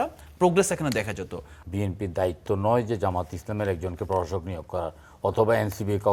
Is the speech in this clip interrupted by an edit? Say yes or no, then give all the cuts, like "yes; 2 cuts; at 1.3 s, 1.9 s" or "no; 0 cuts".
yes; 1 cut; at 1.5 s